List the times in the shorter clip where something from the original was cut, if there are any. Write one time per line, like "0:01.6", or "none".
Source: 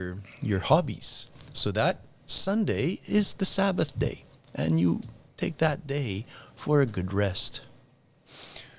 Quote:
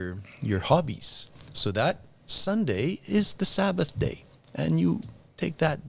none